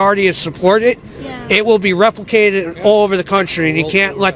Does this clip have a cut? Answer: no; 0 cuts

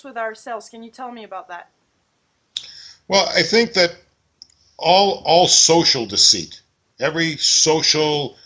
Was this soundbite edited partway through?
no; 0 cuts

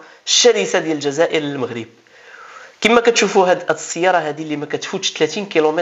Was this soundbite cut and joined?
no; 0 cuts

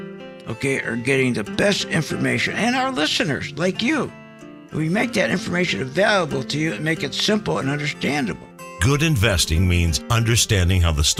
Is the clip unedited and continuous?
yes; 0 cuts

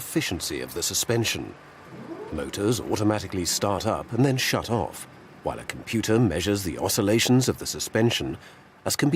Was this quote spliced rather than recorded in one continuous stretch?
no; 0 cuts

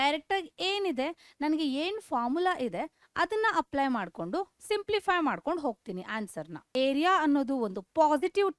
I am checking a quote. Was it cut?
yes; 1 cut; at 6.6 s

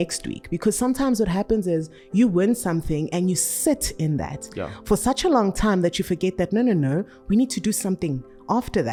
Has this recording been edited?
no; 0 cuts

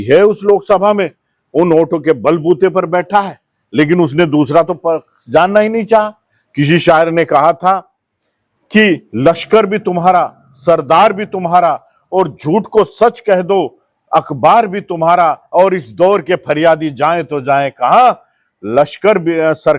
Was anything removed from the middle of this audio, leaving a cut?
no; 0 cuts

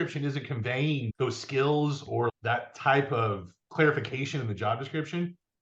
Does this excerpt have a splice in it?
no; 0 cuts

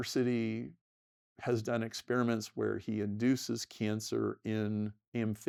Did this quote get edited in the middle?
no; 0 cuts

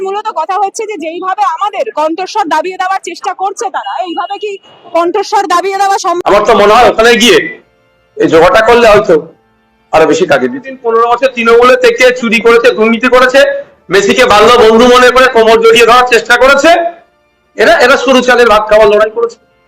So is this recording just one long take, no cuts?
no; 1 cut; at 6.2 s

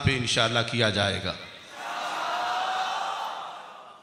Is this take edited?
no; 0 cuts

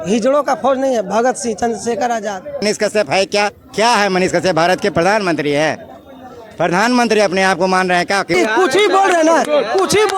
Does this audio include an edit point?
yes; 2 cuts; at 2.6 s, 8.3 s

